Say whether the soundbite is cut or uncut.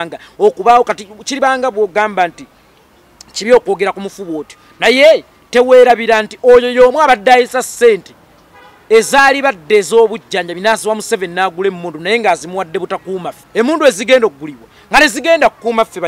cut